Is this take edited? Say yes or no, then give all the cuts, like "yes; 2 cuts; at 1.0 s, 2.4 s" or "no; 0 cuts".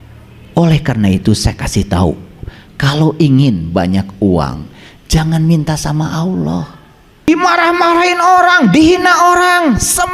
yes; 1 cut; at 7.3 s